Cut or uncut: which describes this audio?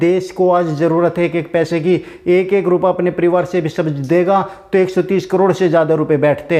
uncut